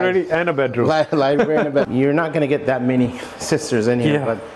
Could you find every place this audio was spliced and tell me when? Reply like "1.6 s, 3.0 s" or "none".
1.9 s